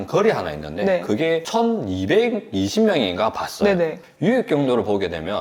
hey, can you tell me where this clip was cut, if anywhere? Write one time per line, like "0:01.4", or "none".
none